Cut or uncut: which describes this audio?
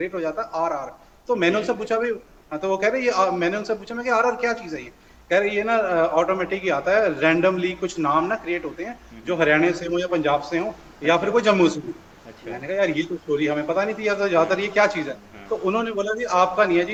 uncut